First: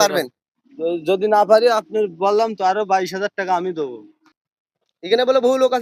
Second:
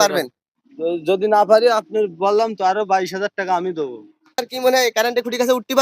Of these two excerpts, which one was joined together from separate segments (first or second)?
second